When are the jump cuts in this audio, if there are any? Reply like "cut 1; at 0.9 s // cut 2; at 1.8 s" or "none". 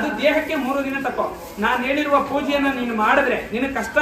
none